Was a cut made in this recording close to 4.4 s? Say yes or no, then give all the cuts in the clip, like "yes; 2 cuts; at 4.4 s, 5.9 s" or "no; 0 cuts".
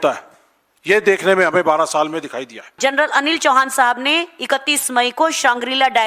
no; 1 cut; at 2.8 s